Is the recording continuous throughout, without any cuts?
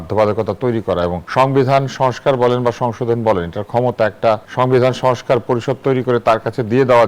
no; 2 cuts; at 1.2 s, 4.5 s

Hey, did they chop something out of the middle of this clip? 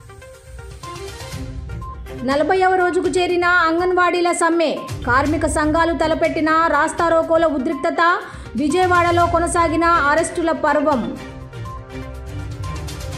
no; 0 cuts

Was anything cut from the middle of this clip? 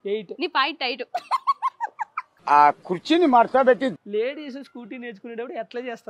yes; 1 cut; at 4.0 s

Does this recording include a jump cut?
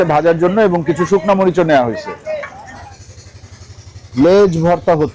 no; 0 cuts

